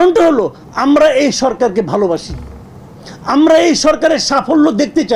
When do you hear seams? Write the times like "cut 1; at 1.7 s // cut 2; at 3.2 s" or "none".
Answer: none